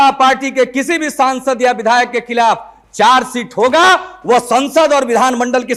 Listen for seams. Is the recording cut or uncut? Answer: uncut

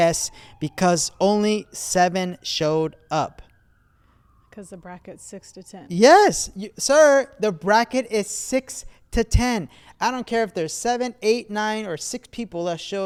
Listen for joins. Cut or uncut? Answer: uncut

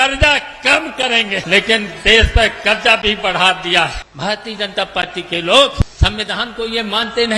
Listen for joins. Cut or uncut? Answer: cut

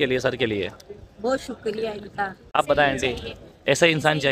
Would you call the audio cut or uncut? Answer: cut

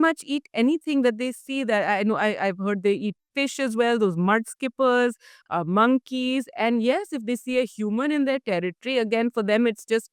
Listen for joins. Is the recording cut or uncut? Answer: uncut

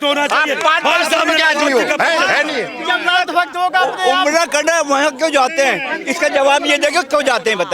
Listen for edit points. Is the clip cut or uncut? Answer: uncut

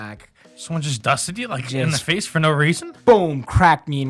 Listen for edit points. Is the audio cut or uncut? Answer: uncut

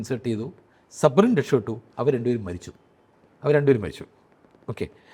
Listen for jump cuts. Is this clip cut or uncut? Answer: uncut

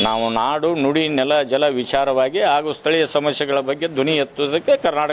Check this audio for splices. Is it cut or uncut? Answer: uncut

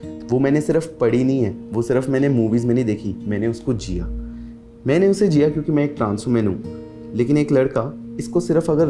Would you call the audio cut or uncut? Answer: uncut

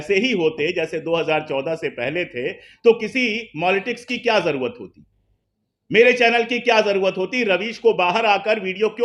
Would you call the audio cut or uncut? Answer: uncut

